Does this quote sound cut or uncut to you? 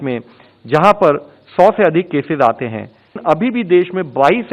cut